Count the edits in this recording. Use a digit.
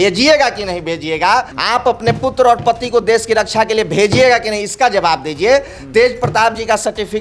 1